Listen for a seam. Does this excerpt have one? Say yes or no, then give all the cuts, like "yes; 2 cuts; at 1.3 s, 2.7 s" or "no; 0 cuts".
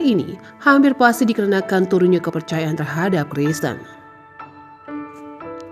yes; 1 cut; at 3.9 s